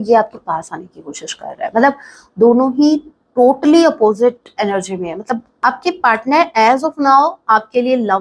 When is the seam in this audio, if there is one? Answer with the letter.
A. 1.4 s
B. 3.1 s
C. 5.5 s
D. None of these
C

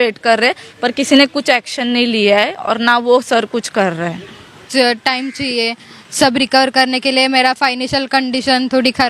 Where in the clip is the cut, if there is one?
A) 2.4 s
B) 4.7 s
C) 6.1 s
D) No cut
B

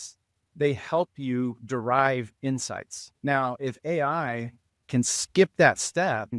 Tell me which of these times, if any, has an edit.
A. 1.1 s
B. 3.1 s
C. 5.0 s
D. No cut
B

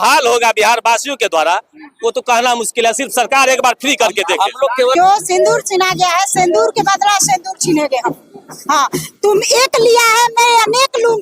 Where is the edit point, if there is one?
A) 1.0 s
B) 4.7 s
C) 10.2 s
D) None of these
B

